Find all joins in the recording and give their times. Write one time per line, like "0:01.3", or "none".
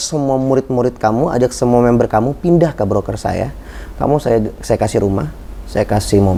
none

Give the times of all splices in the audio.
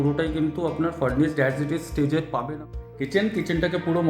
0:02.5

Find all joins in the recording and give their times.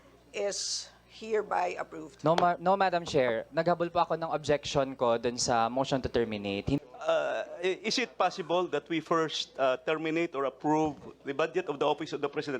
0:06.8

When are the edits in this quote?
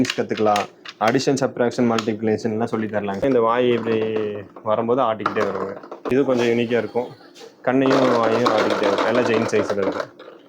0:03.2
0:06.2

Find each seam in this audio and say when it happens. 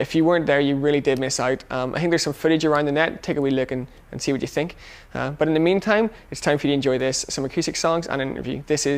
none

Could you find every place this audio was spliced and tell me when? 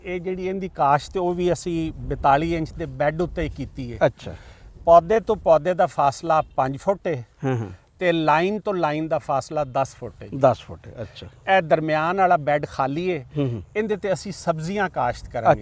none

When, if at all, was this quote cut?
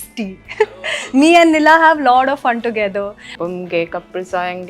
0:03.3

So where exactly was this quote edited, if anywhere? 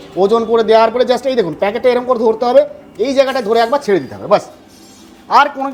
none

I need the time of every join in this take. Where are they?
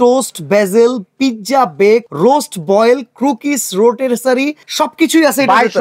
0:02.1
0:04.6

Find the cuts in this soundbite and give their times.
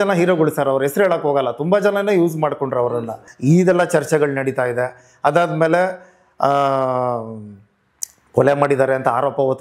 0:03.2

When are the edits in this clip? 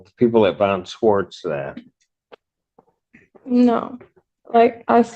none

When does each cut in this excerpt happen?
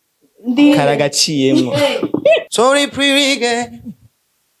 0:02.4

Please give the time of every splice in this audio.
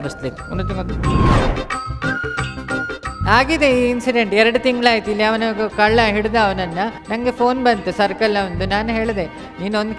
0:07.0

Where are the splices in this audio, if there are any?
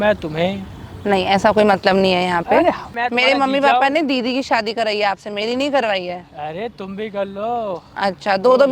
0:02.9

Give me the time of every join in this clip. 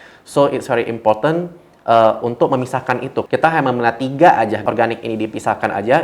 0:03.3
0:04.6

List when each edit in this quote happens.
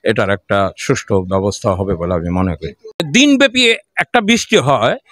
0:03.0

